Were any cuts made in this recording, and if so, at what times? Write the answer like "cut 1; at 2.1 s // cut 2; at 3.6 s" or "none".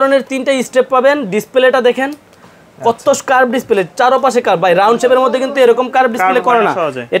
none